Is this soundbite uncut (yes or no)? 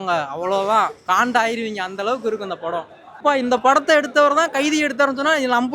no